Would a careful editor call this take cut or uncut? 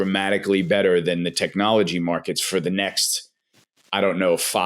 uncut